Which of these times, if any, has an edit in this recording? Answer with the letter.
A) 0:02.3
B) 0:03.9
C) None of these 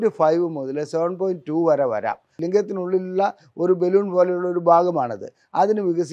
A